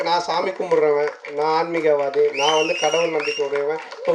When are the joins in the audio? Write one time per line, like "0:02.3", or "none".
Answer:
none